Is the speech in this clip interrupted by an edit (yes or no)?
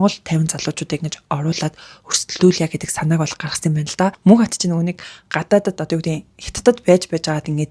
yes